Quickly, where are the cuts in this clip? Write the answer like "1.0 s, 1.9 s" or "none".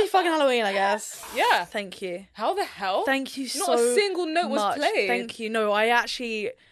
1.1 s